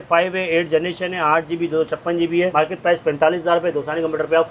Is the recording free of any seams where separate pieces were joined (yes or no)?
yes